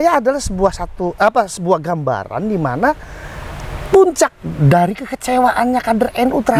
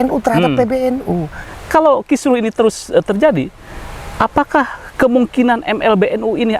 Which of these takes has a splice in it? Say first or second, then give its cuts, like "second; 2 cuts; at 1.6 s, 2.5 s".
second; 1 cut; at 1.4 s